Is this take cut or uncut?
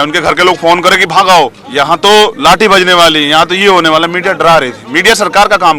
cut